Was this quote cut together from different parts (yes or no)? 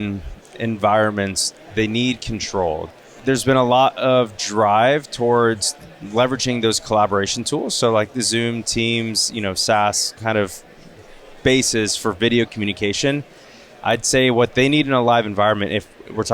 yes